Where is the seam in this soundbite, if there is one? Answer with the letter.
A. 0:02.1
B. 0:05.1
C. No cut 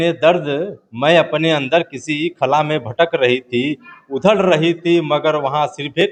C